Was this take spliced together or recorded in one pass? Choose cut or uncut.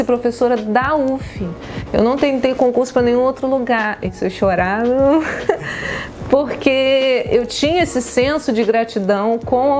uncut